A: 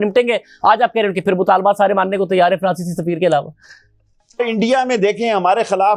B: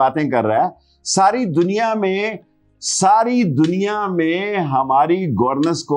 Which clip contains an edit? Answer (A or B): A